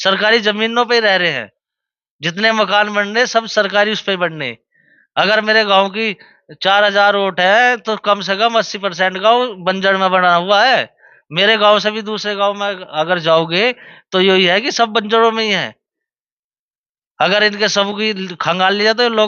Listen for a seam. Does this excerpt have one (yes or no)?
no